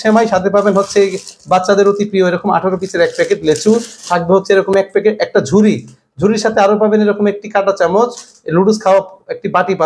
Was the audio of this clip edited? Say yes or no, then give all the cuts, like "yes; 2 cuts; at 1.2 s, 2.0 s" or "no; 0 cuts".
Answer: no; 0 cuts